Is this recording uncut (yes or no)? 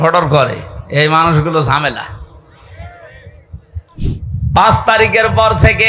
no